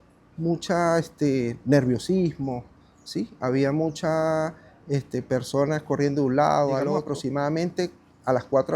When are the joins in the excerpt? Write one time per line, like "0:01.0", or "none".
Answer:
0:07.0